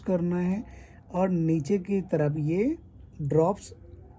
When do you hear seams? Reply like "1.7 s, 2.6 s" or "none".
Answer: none